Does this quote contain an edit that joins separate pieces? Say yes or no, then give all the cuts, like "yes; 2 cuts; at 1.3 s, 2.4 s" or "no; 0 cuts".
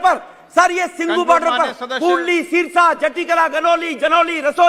no; 0 cuts